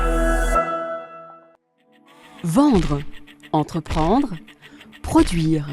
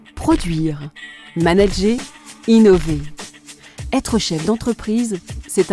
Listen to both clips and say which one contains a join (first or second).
first